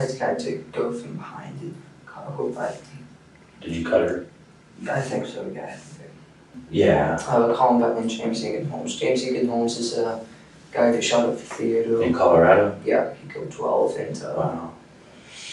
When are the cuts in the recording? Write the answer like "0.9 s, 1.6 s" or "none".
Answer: 6.5 s